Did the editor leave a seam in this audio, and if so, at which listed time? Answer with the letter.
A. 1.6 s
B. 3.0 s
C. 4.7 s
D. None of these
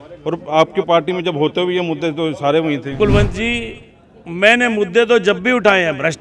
B